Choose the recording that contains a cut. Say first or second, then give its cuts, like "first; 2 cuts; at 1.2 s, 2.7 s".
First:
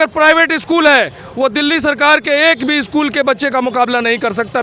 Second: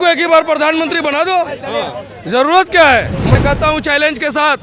second; 1 cut; at 3.4 s